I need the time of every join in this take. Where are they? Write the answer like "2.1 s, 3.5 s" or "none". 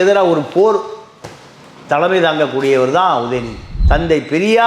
3.7 s

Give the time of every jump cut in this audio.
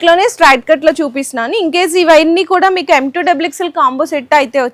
none

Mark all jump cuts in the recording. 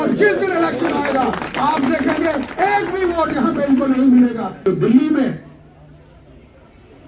4.6 s

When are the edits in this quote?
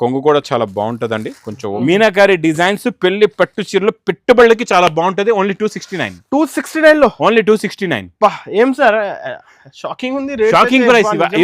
1.7 s

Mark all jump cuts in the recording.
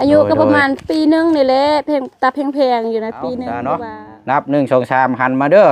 3.5 s

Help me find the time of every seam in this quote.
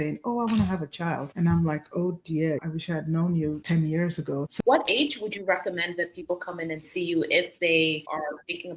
4.5 s

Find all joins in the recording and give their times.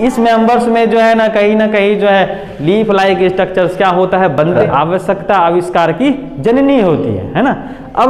4.6 s

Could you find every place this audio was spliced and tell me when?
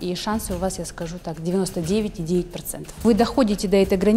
3.0 s

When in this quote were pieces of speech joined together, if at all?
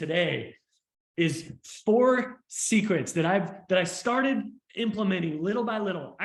none

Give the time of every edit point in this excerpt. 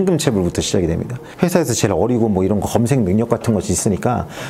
1.2 s

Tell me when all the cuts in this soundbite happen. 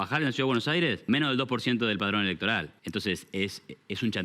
1.0 s, 2.7 s

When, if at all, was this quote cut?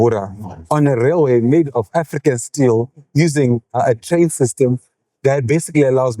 3.7 s

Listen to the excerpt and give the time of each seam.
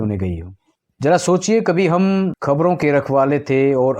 2.4 s

